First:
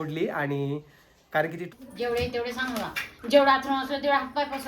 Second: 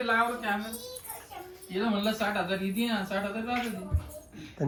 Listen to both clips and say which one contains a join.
first; 1 cut; at 1.7 s

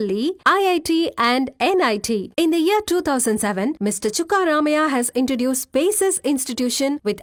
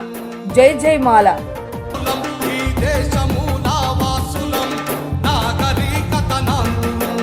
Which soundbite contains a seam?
second; 1 cut; at 1.3 s

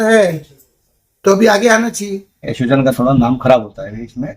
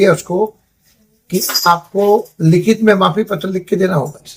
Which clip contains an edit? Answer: first; 1 cut; at 2.5 s

